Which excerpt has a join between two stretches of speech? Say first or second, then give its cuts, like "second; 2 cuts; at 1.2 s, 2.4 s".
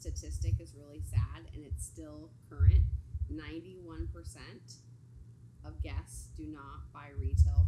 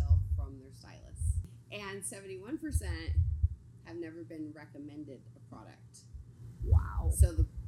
second; 1 cut; at 1.5 s